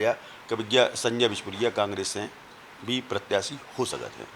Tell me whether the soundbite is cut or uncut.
uncut